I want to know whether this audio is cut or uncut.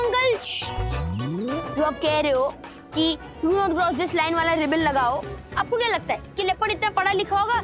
uncut